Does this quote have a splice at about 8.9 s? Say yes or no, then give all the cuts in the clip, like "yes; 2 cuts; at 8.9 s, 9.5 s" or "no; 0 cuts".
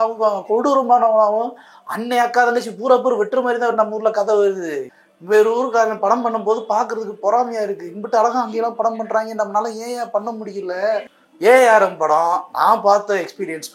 no; 2 cuts; at 4.9 s, 11.2 s